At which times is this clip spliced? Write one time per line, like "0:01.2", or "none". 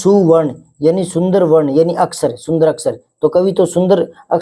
none